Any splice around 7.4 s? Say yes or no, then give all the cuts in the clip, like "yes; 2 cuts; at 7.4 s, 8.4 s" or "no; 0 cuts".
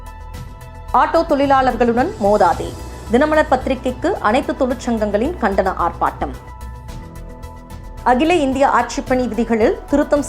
no; 1 cut; at 0.9 s